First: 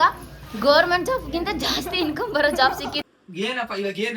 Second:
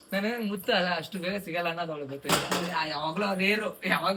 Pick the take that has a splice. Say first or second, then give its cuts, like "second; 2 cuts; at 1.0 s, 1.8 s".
first; 1 cut; at 3.0 s